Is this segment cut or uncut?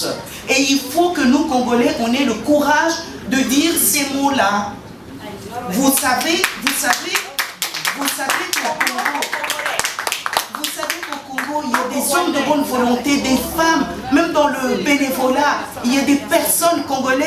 uncut